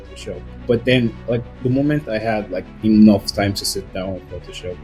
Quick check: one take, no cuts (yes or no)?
yes